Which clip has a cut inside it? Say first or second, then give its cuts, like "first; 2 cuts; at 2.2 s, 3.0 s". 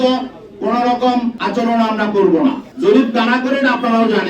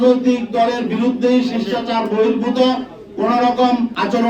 first; 1 cut; at 2.7 s